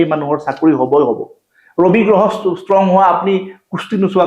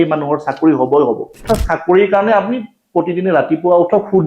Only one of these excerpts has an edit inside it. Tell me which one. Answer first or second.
second